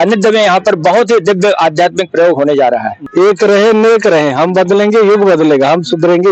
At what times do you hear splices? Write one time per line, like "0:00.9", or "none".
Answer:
0:03.0